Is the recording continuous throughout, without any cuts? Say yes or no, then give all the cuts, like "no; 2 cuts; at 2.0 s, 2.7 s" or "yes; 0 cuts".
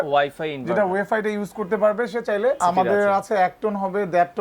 no; 1 cut; at 2.6 s